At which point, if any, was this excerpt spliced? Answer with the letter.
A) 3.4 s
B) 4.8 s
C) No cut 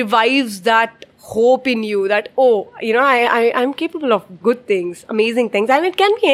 C